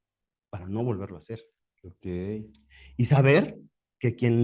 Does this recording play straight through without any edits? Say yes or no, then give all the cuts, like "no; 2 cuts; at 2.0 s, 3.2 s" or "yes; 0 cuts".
yes; 0 cuts